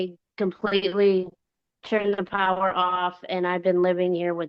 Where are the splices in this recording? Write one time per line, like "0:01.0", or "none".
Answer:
none